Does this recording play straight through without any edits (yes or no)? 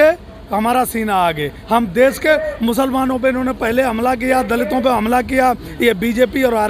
yes